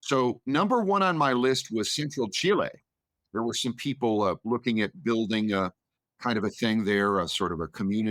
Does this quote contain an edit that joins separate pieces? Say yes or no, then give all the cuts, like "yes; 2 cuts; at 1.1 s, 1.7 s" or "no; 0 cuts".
no; 0 cuts